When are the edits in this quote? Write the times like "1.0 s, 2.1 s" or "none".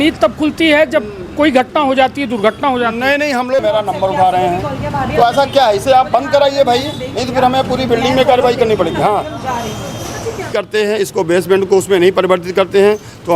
3.6 s, 10.5 s

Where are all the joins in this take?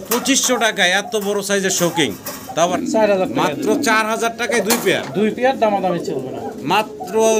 2.7 s

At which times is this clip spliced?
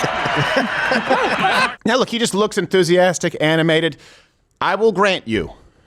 1.7 s

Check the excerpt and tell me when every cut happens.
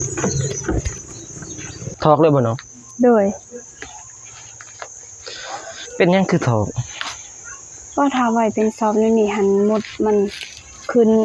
1.9 s

